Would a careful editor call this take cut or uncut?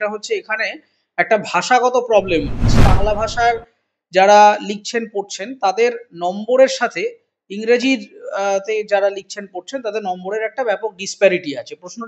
cut